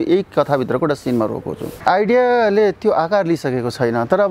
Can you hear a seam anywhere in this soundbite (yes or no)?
yes